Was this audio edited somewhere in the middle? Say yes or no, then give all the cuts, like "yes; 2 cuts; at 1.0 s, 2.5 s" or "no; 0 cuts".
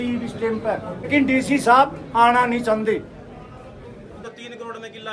yes; 2 cuts; at 1.1 s, 4.2 s